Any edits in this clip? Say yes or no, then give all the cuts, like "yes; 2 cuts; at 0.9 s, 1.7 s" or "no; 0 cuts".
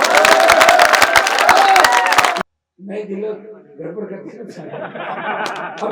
yes; 1 cut; at 2.4 s